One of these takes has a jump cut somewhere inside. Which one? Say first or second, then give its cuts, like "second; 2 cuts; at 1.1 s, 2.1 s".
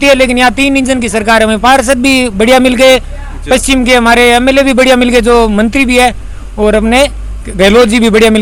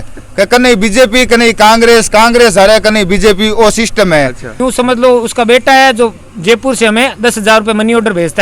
second; 1 cut; at 4.6 s